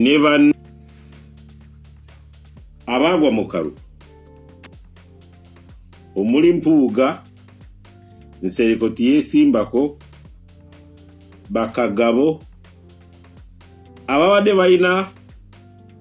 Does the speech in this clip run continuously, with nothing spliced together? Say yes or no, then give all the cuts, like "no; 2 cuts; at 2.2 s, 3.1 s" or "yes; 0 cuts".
no; 4 cuts; at 0.8 s, 2.5 s, 4.0 s, 6.1 s